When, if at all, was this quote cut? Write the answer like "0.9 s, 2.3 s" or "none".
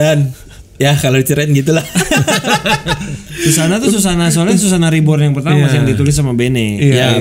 none